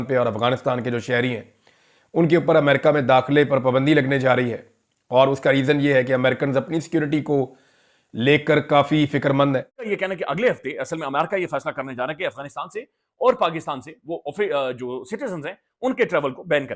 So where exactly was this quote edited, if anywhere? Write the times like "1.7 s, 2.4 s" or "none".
9.9 s